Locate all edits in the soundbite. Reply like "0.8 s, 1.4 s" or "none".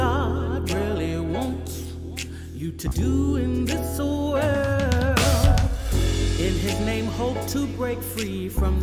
none